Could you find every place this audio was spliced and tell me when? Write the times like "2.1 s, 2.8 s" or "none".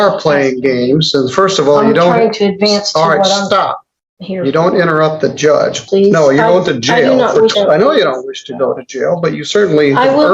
5.8 s, 7.5 s